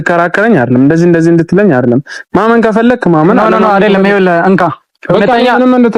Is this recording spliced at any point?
no; 0 cuts

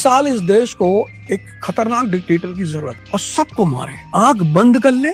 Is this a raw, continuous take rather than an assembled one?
yes; 0 cuts

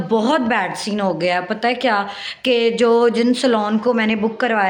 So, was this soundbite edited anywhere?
yes; 1 cut; at 1.4 s

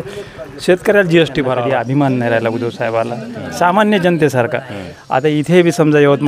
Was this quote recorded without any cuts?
no; 1 cut; at 1.6 s

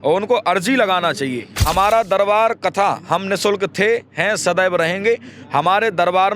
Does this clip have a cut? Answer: yes; 1 cut; at 1.7 s

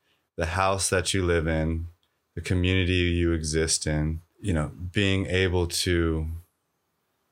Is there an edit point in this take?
yes; 1 cut; at 4.3 s

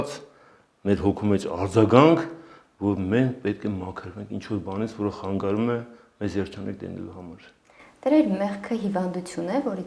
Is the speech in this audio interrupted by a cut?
no; 0 cuts

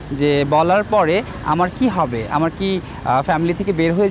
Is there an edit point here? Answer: no; 0 cuts

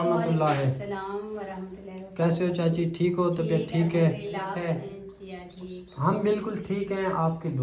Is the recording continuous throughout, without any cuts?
no; 1 cut; at 4.5 s

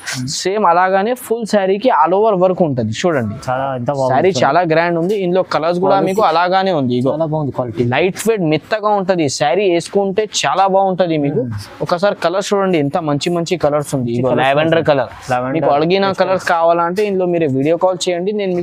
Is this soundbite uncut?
yes; 0 cuts

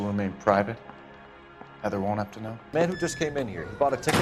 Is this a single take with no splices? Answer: no; 1 cut; at 2.6 s

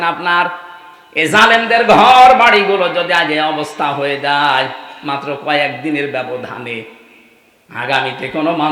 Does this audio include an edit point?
no; 0 cuts

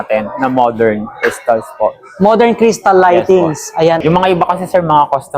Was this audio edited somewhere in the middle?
yes; 1 cut; at 4.0 s

